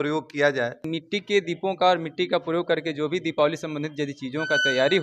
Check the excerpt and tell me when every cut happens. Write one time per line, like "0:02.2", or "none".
0:00.9